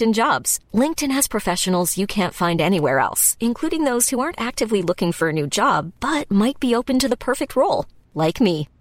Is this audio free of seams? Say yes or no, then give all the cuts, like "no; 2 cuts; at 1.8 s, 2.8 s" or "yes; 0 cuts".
yes; 0 cuts